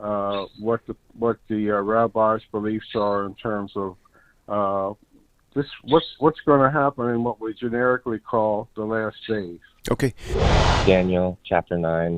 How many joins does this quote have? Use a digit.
1